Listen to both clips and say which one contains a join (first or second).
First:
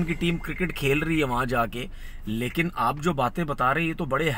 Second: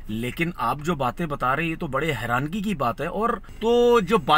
second